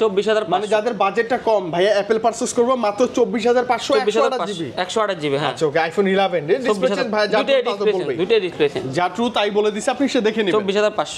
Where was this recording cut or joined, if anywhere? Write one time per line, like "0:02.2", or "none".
none